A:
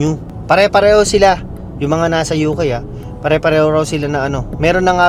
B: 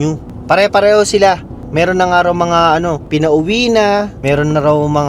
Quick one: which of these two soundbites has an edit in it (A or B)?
B